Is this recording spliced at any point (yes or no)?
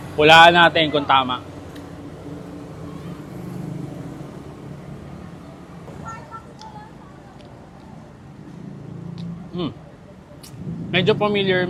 no